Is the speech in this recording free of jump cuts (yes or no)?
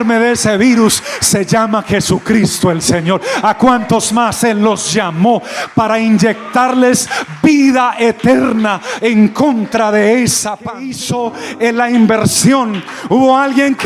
no